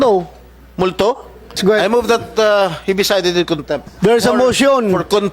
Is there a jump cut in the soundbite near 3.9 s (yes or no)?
yes